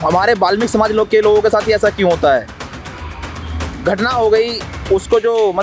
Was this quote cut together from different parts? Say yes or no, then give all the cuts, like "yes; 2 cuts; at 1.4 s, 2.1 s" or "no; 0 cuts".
no; 0 cuts